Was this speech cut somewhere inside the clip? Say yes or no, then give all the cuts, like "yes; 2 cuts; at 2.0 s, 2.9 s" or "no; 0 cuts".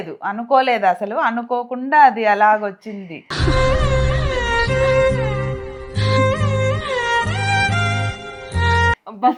no; 0 cuts